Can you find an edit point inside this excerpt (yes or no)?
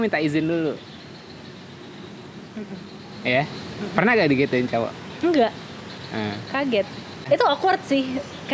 yes